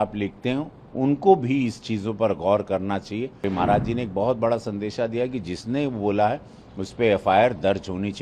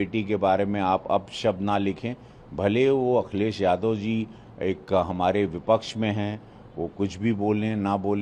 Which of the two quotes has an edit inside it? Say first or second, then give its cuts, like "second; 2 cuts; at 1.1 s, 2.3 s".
first; 1 cut; at 3.4 s